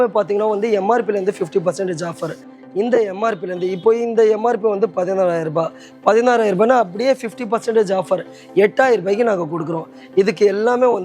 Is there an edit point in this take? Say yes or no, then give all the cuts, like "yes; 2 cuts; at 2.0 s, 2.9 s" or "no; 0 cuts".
yes; 1 cut; at 2.5 s